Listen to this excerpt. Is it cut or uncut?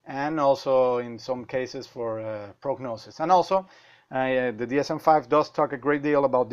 cut